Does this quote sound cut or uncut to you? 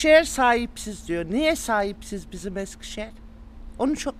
uncut